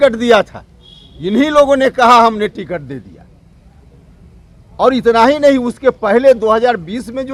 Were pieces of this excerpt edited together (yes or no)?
no